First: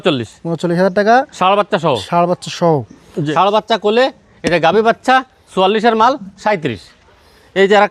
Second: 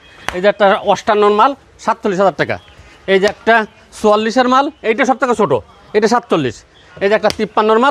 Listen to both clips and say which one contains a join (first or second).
first